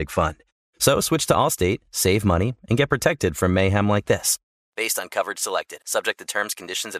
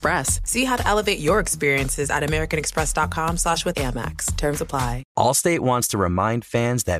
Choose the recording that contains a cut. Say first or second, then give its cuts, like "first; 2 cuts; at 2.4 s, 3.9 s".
second; 1 cut; at 5.0 s